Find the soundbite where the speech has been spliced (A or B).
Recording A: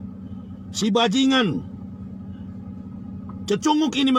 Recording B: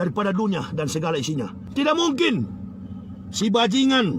B